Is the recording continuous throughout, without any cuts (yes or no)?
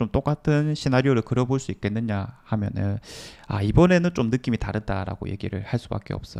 yes